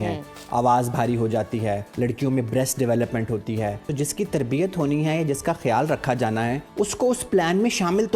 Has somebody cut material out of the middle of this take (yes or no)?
yes